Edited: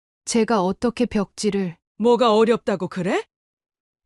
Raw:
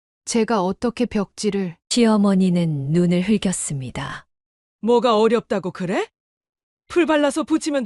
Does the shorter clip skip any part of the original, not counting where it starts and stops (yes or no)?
yes